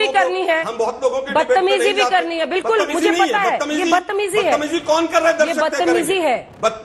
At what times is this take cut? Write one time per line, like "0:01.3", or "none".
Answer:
none